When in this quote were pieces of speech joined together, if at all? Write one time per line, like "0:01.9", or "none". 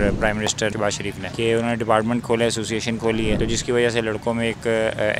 0:00.8
0:03.4